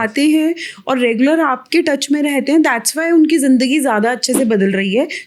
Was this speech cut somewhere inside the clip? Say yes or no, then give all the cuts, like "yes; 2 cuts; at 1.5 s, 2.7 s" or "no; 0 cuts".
no; 0 cuts